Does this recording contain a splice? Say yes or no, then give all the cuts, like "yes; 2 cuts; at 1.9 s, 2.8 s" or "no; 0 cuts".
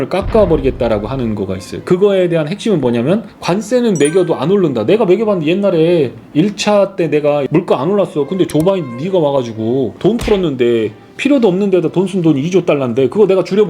yes; 1 cut; at 7.5 s